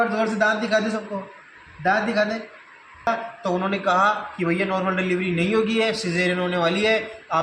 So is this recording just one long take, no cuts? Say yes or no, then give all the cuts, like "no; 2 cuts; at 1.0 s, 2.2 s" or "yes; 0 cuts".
no; 1 cut; at 3.1 s